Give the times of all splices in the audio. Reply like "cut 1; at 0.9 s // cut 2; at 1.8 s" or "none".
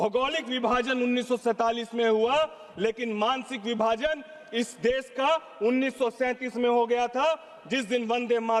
none